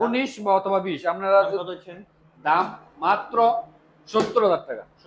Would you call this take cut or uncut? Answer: cut